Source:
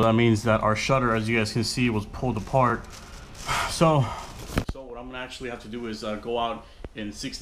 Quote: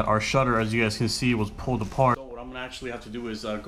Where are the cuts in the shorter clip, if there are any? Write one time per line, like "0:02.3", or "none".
0:02.2